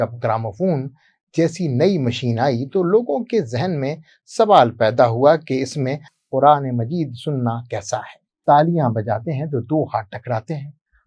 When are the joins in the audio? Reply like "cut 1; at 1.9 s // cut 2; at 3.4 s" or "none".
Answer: cut 1; at 8.2 s

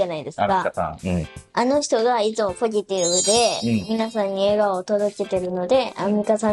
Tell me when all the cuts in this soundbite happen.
none

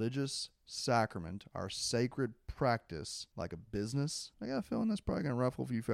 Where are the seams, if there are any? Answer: cut 1; at 3.2 s // cut 2; at 4.3 s

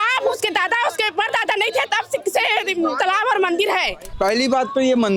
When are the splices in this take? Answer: cut 1; at 4.0 s

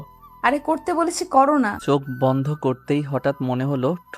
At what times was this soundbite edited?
cut 1; at 1.8 s

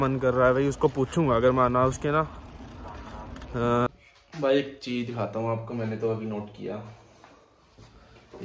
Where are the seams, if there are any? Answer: cut 1; at 3.9 s

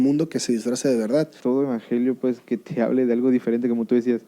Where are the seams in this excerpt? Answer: cut 1; at 1.4 s

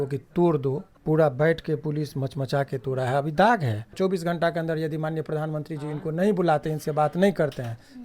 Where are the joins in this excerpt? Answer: cut 1; at 0.9 s // cut 2; at 3.9 s

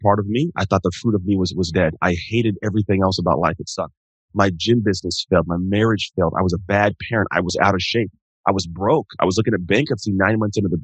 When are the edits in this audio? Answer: none

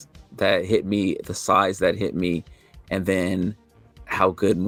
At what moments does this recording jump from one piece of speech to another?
none

